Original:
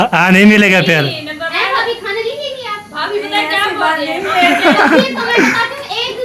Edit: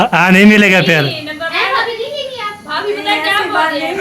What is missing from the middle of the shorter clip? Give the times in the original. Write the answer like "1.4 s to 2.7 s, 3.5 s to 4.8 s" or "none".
2.0 s to 2.2 s